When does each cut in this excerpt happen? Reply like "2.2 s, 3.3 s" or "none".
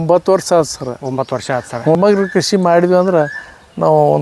1.9 s